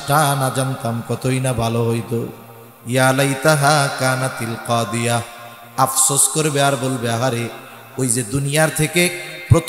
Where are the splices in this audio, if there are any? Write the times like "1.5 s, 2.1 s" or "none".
none